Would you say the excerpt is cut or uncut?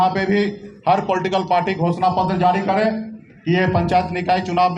uncut